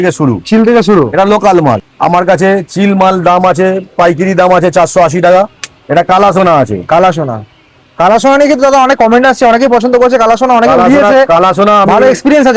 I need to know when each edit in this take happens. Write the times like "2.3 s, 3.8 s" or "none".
1.8 s, 5.5 s